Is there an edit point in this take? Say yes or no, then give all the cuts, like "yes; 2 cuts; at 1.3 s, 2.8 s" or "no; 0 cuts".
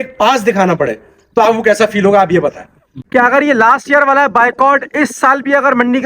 yes; 1 cut; at 2.8 s